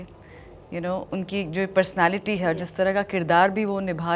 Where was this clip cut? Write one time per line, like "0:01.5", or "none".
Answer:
none